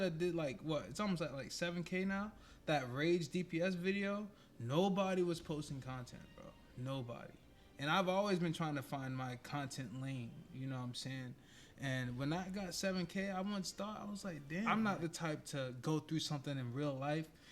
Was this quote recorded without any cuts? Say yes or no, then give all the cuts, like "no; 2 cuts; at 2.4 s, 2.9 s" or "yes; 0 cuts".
no; 1 cut; at 14.7 s